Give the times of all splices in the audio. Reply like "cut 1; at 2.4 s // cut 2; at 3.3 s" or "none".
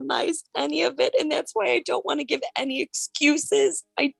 none